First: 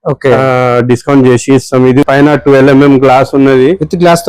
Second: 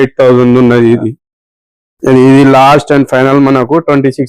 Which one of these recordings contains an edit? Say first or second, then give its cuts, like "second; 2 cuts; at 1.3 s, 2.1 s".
first; 1 cut; at 2.0 s